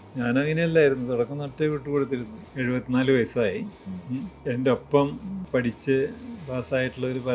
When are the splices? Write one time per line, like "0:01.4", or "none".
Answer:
0:02.4
0:04.3
0:05.3